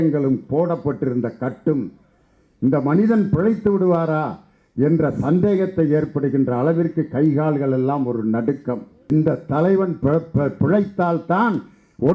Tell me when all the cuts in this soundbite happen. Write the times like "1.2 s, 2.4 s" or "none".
9.1 s